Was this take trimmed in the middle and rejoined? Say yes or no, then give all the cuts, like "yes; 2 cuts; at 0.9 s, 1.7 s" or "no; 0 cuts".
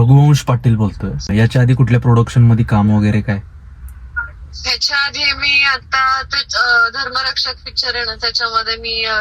yes; 1 cut; at 1.3 s